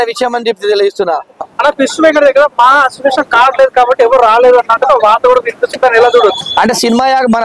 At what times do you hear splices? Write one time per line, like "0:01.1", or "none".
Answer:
0:01.5